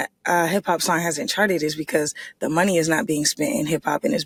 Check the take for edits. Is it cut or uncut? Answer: uncut